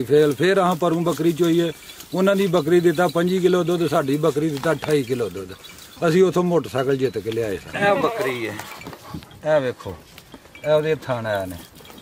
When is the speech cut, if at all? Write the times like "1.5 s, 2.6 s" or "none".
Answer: 7.7 s